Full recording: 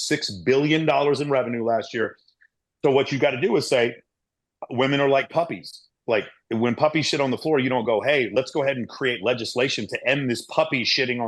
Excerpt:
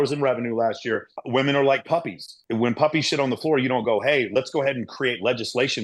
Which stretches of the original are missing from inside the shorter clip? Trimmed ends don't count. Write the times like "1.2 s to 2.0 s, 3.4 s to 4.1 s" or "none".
2.2 s to 4.6 s, 5.8 s to 6.4 s